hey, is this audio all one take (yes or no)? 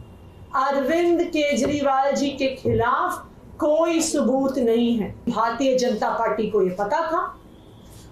no